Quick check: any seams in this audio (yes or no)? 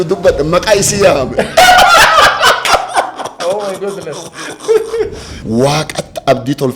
yes